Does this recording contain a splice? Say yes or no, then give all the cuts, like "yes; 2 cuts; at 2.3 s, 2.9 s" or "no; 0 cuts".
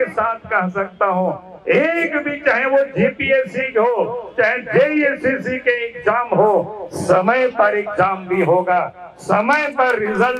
no; 0 cuts